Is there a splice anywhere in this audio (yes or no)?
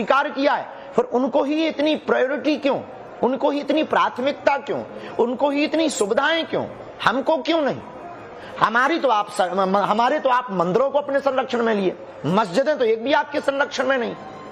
yes